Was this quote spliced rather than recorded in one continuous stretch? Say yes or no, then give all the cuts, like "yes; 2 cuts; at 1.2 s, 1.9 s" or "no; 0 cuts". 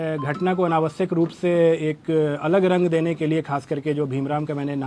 no; 0 cuts